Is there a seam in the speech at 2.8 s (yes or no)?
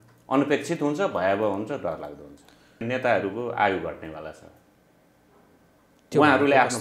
yes